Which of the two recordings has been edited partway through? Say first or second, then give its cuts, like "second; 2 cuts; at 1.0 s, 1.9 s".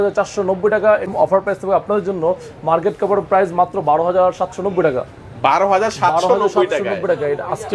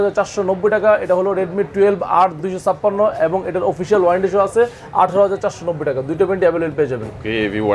first; 1 cut; at 1.1 s